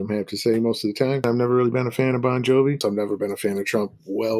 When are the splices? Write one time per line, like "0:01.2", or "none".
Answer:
0:01.2
0:02.8